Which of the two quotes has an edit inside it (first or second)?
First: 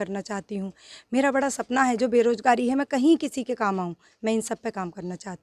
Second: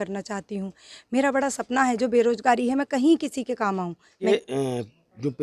second